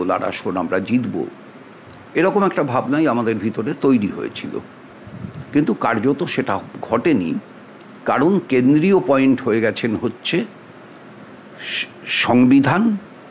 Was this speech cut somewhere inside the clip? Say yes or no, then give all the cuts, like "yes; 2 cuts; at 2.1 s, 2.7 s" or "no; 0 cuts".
no; 0 cuts